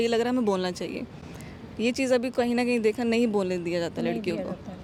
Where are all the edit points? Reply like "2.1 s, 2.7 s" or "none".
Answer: none